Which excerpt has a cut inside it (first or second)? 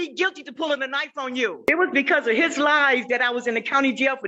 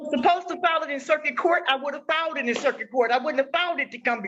first